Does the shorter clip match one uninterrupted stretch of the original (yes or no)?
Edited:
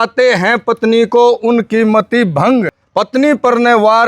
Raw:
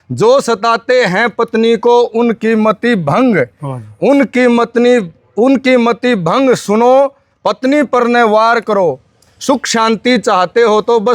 no